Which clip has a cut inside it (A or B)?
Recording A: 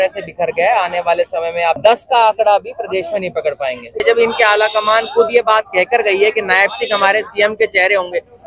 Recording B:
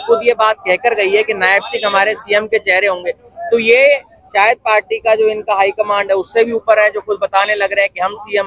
A